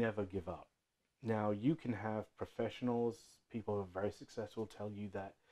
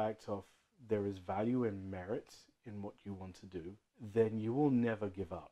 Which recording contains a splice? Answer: second; 1 cut; at 3.9 s

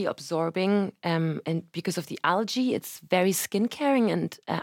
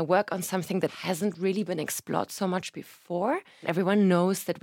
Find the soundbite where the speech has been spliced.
second; 2 cuts; at 0.9 s, 3.7 s

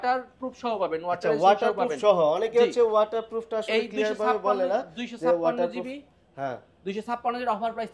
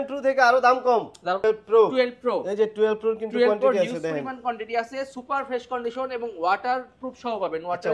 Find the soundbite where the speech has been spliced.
second; 1 cut; at 1.4 s

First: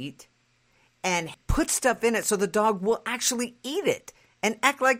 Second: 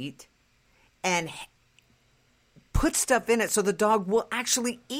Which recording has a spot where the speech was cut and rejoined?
first; 1 cut; at 1.4 s

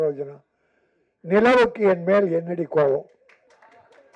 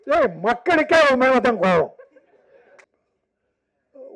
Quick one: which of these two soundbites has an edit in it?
second; 1 cut; at 2.8 s

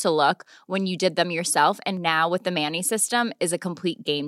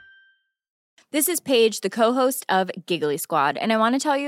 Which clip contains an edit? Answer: second; 1 cut; at 0.9 s

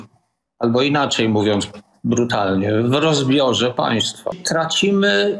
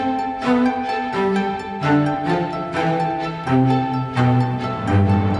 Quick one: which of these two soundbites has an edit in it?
first; 1 cut; at 4.4 s

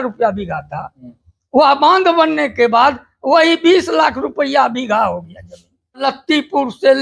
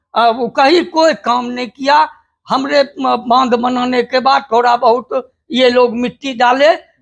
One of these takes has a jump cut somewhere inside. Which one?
first; 1 cut; at 6.0 s

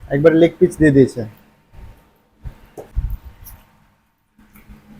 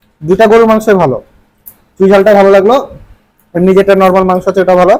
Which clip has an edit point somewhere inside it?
first; 1 cut; at 2.9 s

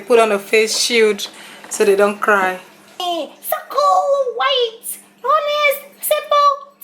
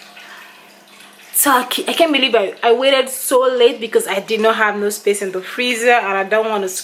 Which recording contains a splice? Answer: first; 1 cut; at 3.0 s

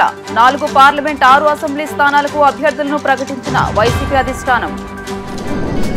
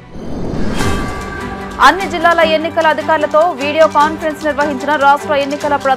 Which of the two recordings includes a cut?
second; 1 cut; at 1.1 s

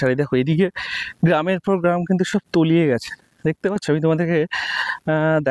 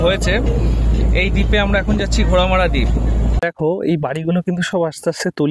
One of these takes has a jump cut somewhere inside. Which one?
second; 1 cut; at 3.3 s

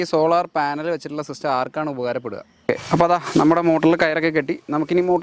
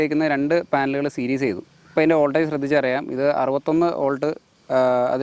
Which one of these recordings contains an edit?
first; 1 cut; at 2.5 s

